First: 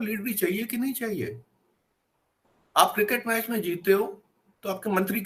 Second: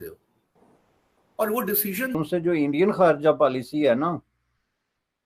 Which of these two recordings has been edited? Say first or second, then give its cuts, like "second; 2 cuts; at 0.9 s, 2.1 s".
second; 1 cut; at 2.1 s